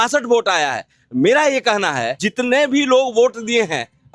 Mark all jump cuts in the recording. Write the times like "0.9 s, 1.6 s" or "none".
2.2 s